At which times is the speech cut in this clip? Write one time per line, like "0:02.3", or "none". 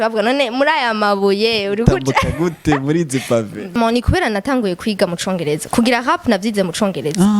0:03.7